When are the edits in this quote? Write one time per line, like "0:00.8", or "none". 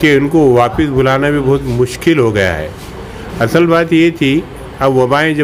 none